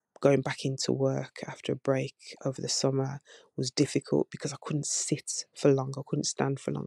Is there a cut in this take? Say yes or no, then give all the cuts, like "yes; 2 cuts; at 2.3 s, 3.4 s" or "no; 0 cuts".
no; 0 cuts